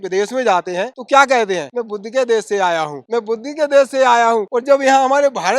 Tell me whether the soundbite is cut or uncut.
cut